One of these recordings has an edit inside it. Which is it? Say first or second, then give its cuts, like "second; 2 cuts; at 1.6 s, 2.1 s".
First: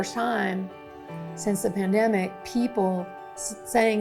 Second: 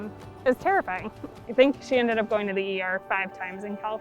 second; 1 cut; at 1.1 s